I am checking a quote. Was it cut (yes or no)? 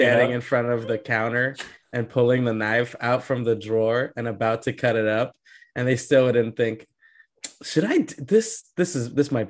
no